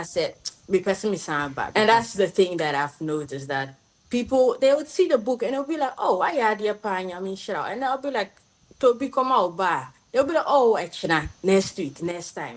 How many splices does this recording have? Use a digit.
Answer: 1